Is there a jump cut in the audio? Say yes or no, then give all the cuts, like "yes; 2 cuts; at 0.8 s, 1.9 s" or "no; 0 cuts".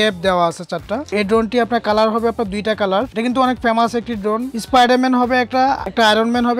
yes; 2 cuts; at 1.1 s, 4.5 s